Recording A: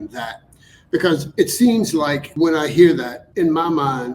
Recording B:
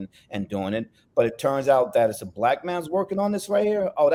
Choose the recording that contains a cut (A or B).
A